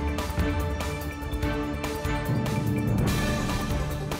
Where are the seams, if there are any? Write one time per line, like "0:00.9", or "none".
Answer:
0:01.4